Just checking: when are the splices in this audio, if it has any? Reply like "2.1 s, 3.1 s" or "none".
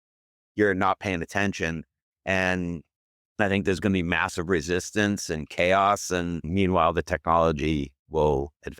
6.4 s